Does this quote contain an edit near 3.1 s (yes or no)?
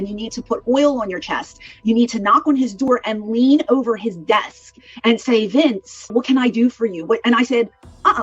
no